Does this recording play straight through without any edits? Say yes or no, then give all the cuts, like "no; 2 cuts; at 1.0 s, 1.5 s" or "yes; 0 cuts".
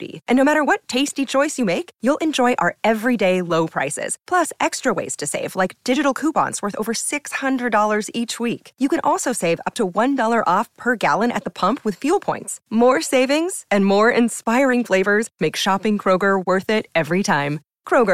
yes; 0 cuts